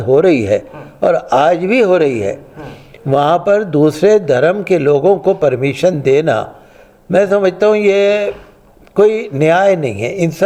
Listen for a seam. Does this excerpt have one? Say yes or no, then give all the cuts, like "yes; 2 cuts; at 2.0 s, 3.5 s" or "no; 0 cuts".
no; 0 cuts